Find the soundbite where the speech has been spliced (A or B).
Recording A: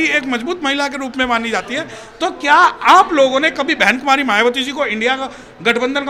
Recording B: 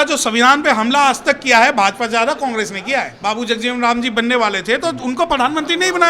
B